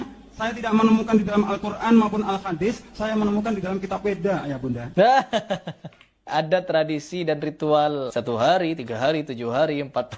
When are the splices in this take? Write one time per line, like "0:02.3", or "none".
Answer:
0:04.8
0:06.3
0:08.1